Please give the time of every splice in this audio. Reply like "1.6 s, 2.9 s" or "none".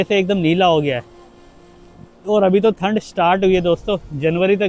none